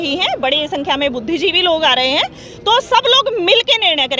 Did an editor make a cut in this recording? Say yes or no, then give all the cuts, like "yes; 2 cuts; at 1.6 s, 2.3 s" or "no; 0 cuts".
no; 0 cuts